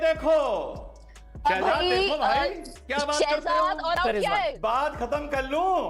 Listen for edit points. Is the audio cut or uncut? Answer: uncut